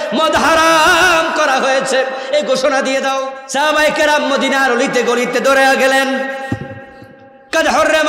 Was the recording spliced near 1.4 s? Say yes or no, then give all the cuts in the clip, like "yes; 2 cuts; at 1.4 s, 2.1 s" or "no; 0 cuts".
no; 1 cut; at 3.4 s